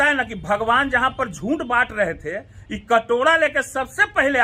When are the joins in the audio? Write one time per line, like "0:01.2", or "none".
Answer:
none

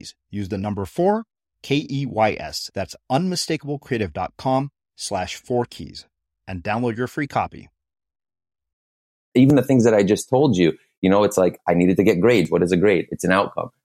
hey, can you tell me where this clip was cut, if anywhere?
0:09.3

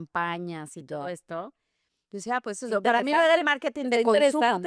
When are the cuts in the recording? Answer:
none

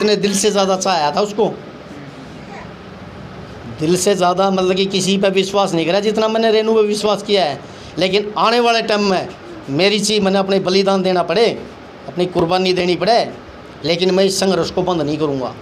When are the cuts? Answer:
none

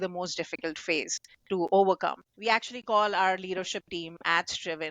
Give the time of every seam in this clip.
0:02.3

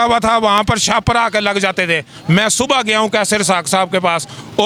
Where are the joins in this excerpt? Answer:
none

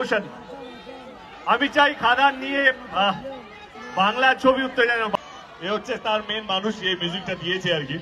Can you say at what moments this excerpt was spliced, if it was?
0:05.1

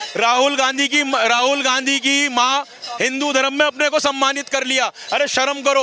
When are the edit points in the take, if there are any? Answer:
0:02.8

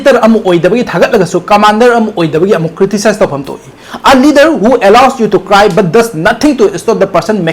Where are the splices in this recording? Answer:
none

